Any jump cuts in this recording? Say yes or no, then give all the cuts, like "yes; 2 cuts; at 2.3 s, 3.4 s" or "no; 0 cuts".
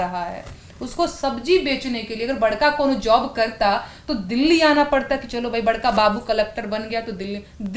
no; 0 cuts